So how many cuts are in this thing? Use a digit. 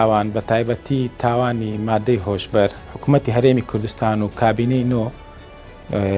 1